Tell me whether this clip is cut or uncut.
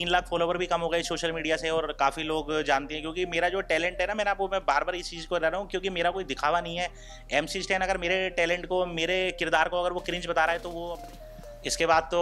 cut